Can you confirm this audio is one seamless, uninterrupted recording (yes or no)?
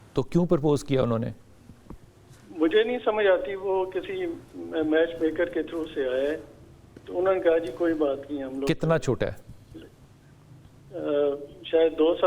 yes